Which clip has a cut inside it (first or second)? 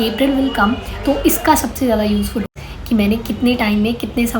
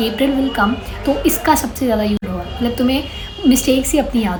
first